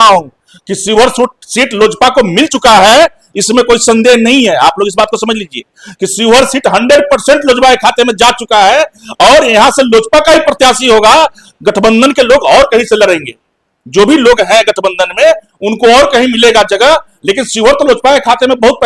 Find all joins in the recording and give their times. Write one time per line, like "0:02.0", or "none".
none